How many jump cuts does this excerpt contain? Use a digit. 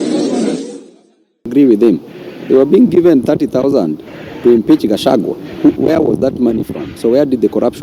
1